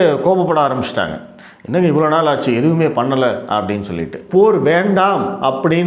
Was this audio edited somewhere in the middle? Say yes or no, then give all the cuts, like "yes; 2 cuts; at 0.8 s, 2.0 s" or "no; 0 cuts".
yes; 1 cut; at 4.2 s